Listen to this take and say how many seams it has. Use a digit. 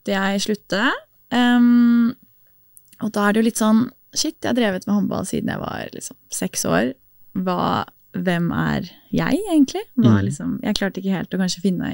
0